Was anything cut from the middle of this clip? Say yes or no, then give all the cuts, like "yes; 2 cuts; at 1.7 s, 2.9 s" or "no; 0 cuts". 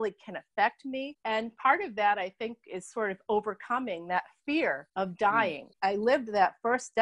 yes; 2 cuts; at 4.8 s, 5.7 s